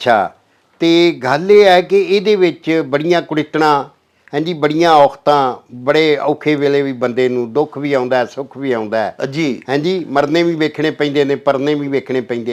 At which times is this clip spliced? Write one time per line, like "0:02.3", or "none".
none